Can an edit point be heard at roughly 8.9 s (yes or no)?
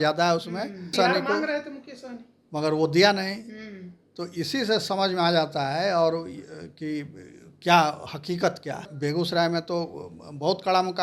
yes